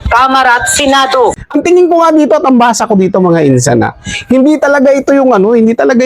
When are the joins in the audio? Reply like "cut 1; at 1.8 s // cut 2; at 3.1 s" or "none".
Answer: cut 1; at 1.4 s